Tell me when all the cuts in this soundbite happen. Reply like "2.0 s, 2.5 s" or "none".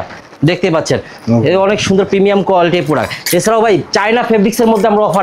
none